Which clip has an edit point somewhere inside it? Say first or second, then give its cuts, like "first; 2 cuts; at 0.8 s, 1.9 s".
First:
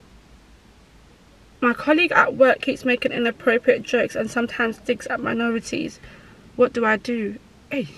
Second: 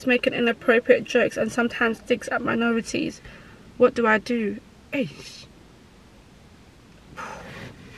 first; 1 cut; at 1.5 s